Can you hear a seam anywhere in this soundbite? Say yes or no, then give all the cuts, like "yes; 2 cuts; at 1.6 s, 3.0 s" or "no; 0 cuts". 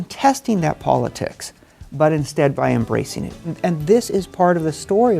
yes; 1 cut; at 3.5 s